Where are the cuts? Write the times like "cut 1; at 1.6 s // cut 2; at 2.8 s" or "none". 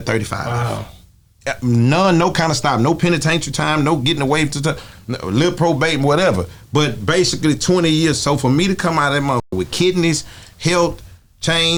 none